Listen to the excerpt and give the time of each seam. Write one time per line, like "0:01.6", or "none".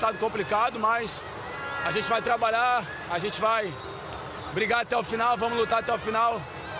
none